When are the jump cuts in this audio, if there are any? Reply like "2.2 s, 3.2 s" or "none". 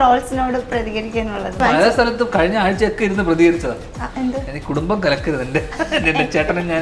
1.6 s